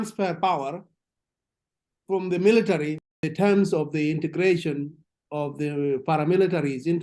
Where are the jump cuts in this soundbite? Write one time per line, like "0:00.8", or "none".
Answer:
0:03.0